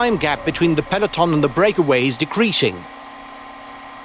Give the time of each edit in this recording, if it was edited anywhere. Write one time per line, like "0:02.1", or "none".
0:02.8